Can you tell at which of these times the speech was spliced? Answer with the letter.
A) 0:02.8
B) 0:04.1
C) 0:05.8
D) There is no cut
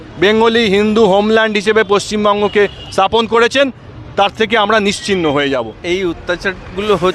C